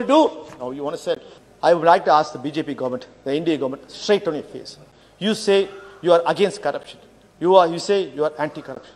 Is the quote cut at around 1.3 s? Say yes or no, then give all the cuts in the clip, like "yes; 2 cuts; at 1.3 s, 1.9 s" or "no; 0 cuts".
yes; 1 cut; at 1.3 s